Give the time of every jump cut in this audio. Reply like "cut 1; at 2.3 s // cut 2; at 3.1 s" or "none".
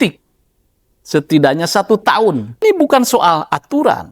cut 1; at 2.6 s